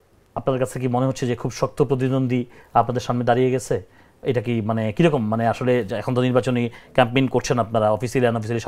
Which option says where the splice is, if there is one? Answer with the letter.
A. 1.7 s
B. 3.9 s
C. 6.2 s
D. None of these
D